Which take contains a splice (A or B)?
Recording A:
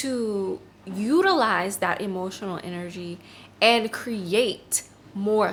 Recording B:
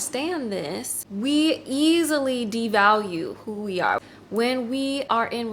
B